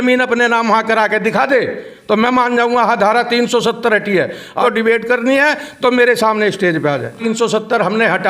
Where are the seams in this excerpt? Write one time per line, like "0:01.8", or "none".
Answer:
0:04.6
0:07.2